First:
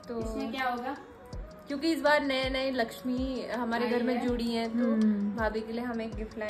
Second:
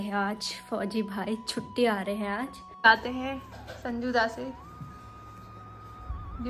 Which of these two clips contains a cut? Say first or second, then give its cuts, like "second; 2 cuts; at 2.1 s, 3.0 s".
second; 1 cut; at 2.8 s